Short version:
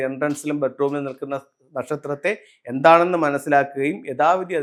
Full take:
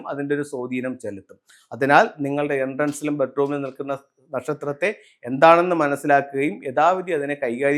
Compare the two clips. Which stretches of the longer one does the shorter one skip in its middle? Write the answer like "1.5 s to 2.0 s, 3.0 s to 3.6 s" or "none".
none